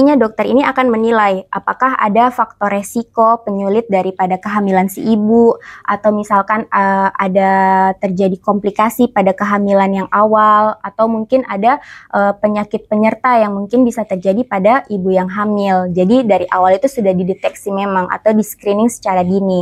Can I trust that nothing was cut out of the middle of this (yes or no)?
yes